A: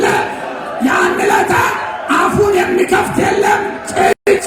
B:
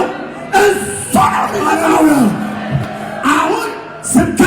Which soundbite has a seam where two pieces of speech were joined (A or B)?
B